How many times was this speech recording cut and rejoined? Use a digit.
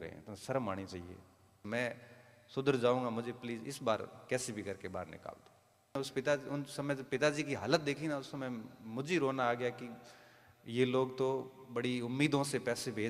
2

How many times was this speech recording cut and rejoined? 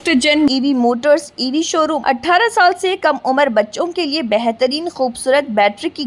1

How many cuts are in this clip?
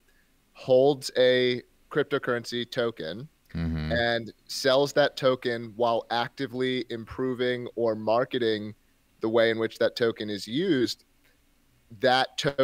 0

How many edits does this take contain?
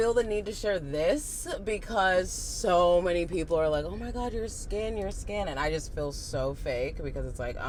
0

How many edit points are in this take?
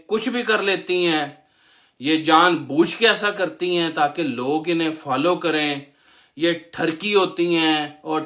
0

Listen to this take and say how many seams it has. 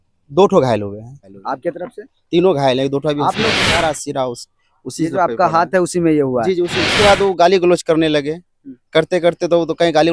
3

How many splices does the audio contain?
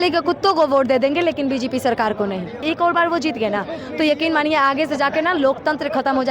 1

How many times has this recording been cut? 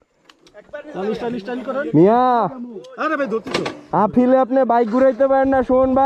0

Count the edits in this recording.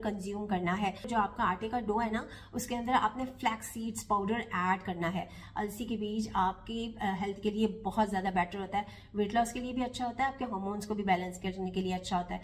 1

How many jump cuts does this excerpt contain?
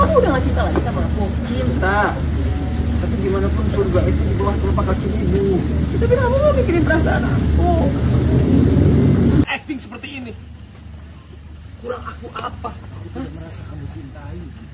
1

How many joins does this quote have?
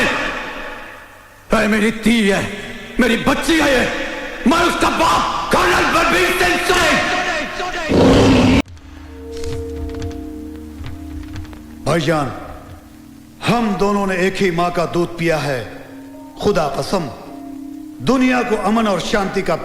1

